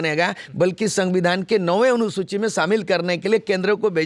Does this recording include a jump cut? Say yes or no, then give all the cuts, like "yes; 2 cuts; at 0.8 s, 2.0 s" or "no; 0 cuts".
no; 0 cuts